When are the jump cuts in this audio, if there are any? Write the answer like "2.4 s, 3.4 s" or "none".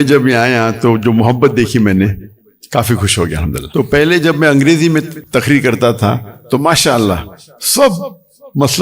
3.6 s, 5.2 s